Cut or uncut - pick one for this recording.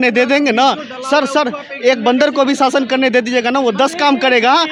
uncut